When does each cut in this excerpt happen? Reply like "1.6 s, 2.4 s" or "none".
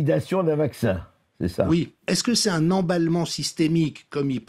2.1 s